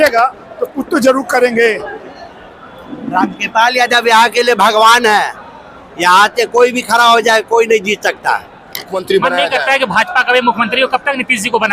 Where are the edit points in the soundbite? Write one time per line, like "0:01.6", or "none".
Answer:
0:02.3
0:09.0